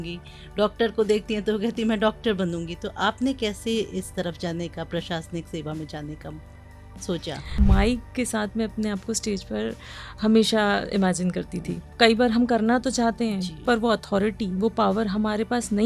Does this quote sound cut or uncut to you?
cut